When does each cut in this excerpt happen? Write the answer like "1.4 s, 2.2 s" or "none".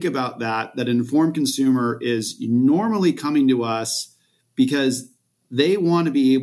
none